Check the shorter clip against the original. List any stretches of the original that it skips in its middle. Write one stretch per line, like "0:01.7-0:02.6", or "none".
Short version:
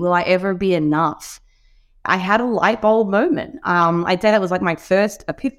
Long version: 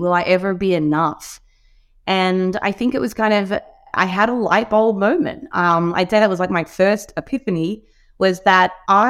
0:01.9-0:03.8